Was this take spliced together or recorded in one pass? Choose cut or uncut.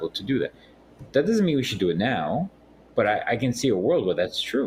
uncut